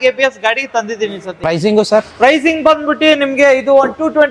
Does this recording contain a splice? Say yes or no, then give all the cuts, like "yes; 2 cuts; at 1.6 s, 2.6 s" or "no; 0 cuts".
yes; 1 cut; at 1.3 s